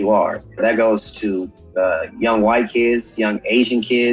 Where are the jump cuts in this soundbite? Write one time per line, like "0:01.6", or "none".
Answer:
none